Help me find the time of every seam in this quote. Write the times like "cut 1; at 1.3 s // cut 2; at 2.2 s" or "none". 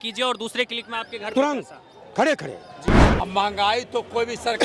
cut 1; at 3.0 s